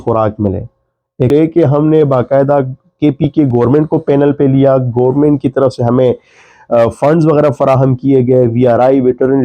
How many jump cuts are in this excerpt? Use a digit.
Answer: 1